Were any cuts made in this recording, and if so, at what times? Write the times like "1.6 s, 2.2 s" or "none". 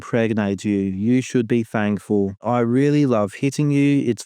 2.4 s